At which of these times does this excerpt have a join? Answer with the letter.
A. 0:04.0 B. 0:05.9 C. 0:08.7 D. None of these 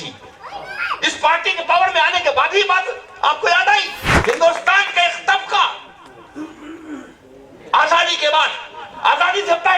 A